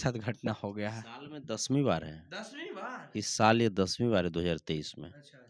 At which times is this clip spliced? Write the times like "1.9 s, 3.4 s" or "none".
none